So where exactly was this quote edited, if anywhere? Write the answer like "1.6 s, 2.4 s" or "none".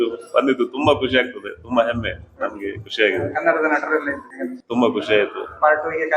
none

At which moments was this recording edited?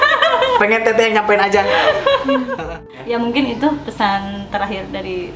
2.7 s

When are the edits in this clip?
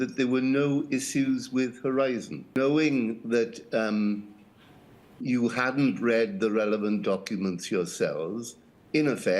2.6 s

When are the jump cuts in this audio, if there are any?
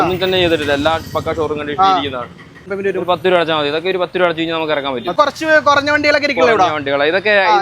2.7 s, 5.1 s

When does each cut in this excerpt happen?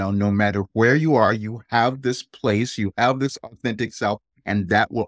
none

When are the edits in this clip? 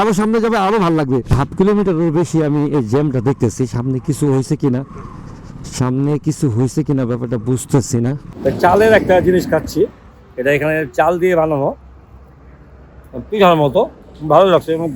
1.3 s, 8.3 s

